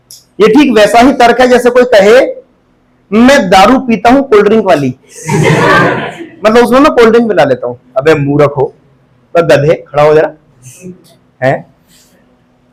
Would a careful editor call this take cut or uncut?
uncut